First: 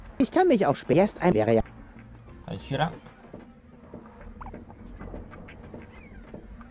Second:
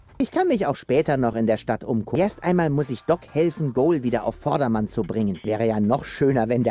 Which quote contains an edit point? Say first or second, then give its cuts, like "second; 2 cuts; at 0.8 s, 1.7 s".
second; 2 cuts; at 0.8 s, 2.1 s